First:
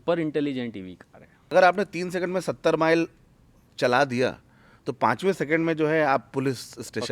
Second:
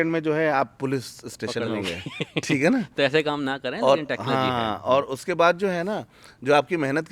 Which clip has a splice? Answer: first; 1 cut; at 1.5 s

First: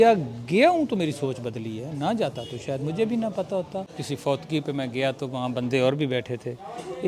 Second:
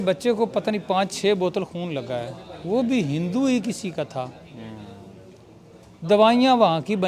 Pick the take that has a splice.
first; 1 cut; at 3.9 s

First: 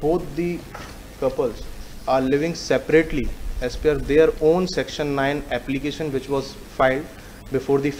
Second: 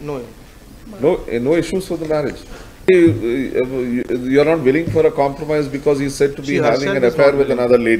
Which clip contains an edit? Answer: second; 1 cut; at 2.8 s

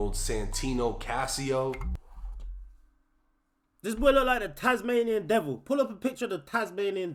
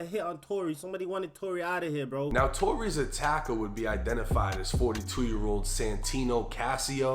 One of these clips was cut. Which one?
second; 1 cut; at 2.3 s

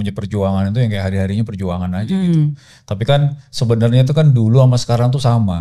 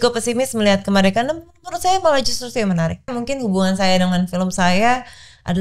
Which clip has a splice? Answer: second; 1 cut; at 3.1 s

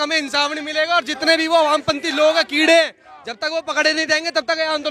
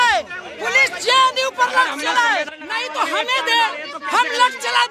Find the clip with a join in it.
second; 1 cut; at 2.5 s

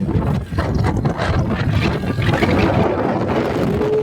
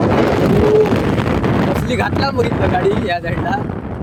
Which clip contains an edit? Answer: first; 1 cut; at 2.4 s

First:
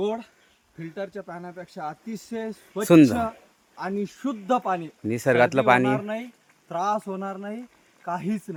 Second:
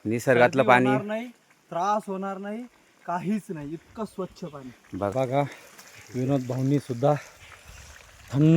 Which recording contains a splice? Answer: second; 1 cut; at 5.1 s

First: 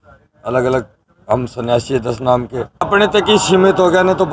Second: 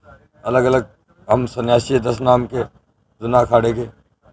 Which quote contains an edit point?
first; 1 cut; at 2.9 s

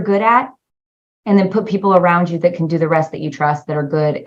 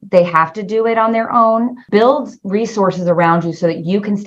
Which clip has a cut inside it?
second; 1 cut; at 1.8 s

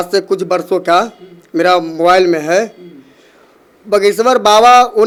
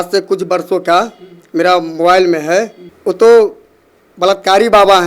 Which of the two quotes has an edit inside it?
second; 1 cut; at 2.8 s

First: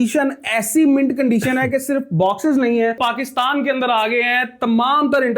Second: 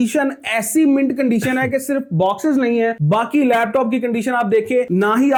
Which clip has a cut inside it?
first; 1 cut; at 3.0 s

